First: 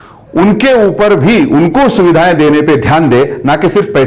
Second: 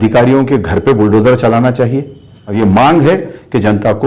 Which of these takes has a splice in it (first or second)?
second